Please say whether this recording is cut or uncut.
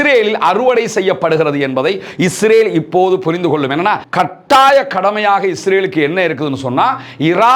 cut